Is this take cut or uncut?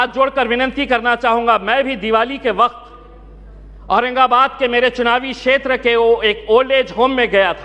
uncut